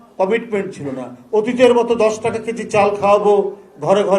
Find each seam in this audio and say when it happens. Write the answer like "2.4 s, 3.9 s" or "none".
none